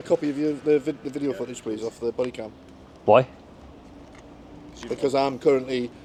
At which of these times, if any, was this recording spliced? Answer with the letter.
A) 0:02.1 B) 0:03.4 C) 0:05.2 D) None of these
D